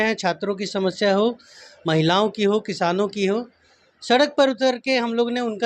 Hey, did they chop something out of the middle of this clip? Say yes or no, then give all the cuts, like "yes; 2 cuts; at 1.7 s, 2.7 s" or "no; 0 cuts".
no; 0 cuts